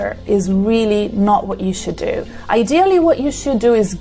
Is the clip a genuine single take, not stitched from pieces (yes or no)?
yes